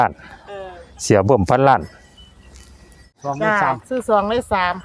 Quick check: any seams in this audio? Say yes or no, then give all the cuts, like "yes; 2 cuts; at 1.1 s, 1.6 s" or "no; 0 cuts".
yes; 1 cut; at 3.2 s